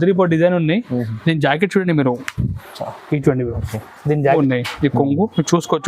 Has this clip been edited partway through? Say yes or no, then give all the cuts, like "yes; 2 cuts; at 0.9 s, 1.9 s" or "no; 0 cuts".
yes; 1 cut; at 4.2 s